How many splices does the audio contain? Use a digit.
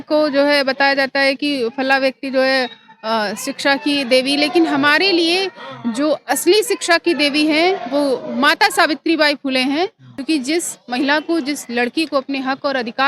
1